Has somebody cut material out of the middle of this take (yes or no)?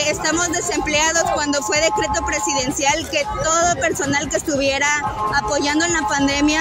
no